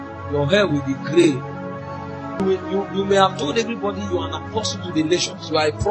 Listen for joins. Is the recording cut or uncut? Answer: cut